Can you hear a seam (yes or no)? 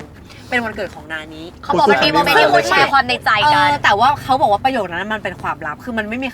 yes